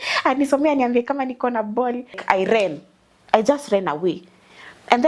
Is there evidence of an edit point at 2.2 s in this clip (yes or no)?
yes